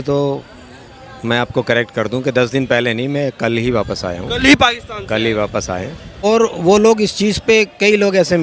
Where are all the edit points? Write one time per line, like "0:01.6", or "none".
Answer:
0:06.2